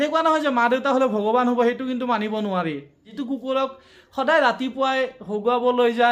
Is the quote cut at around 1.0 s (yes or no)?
no